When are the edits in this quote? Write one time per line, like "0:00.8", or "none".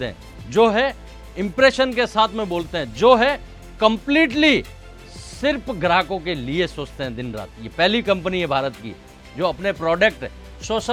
none